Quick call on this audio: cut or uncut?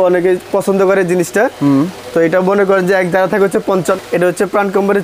cut